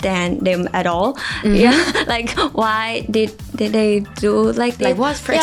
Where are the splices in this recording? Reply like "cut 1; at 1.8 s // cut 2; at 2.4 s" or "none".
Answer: none